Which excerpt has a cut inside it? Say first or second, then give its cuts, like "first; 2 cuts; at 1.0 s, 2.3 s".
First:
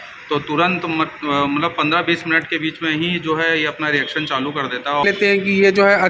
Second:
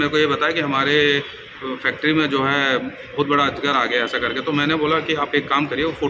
first; 1 cut; at 5.0 s